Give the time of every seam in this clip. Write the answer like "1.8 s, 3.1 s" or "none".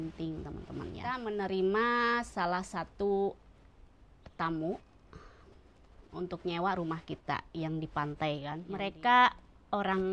1.2 s, 8.6 s